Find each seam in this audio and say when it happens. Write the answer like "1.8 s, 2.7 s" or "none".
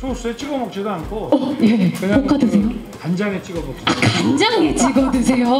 2.9 s